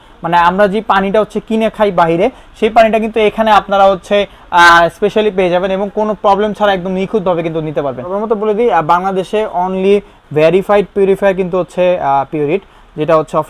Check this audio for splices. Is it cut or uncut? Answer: cut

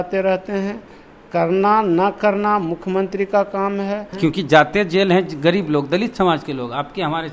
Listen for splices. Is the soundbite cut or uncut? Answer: cut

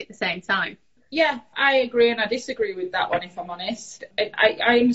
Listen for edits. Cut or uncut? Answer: cut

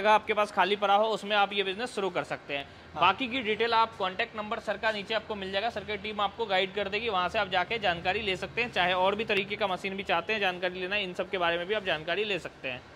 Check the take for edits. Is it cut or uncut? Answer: uncut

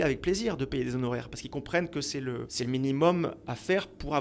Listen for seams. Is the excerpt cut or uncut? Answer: cut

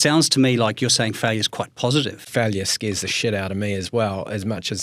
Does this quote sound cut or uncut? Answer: cut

